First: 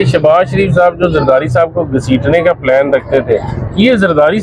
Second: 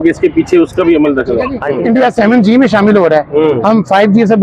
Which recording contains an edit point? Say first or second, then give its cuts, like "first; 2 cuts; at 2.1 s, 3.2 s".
second; 1 cut; at 1.6 s